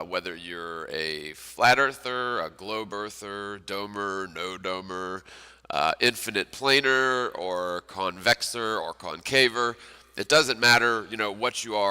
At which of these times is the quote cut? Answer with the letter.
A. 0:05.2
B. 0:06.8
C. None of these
B